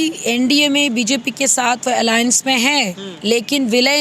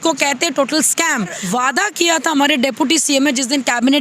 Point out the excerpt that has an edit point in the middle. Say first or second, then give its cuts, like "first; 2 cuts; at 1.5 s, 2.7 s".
second; 1 cut; at 1.4 s